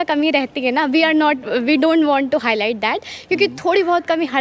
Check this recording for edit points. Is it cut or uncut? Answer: uncut